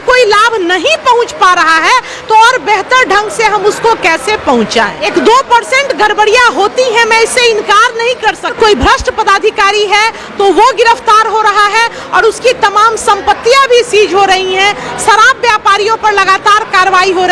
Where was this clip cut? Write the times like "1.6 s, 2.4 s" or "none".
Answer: 5.0 s, 8.5 s